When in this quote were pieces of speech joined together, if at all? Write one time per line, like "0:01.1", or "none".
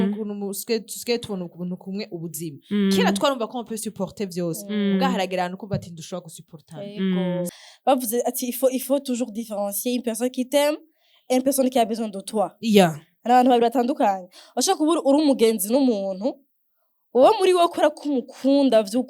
0:07.5